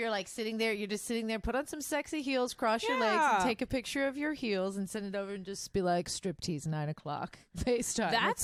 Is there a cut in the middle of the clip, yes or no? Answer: no